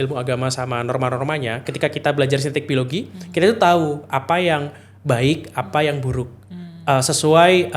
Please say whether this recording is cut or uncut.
uncut